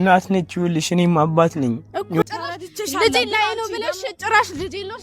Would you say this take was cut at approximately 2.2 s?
yes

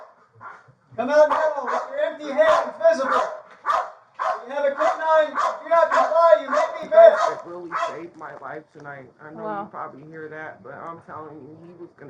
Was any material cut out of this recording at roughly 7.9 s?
yes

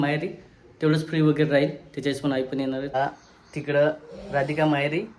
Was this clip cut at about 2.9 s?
yes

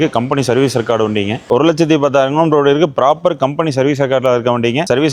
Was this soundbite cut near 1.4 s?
yes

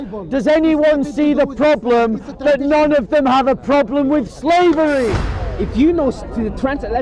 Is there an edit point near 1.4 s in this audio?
no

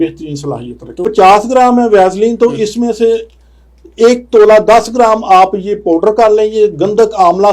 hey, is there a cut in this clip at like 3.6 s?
no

